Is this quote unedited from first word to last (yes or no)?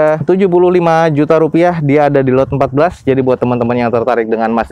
yes